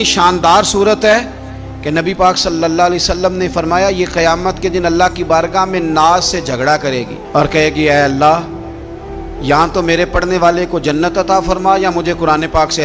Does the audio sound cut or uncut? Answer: uncut